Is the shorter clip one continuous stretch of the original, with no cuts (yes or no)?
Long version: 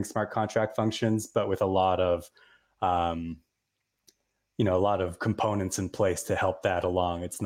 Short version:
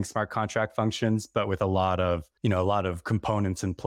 no